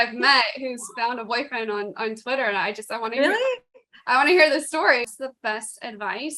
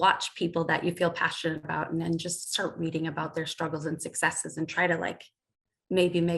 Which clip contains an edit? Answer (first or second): first